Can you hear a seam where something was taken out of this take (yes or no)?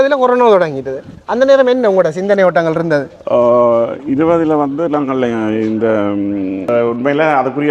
yes